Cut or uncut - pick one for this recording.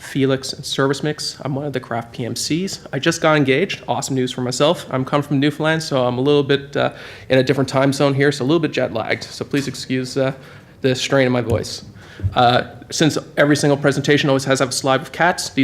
cut